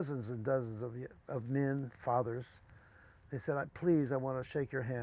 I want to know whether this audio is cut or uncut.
uncut